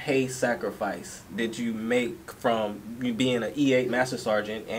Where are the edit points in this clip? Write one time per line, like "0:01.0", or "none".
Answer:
none